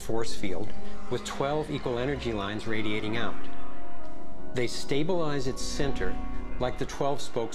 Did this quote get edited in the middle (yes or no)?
yes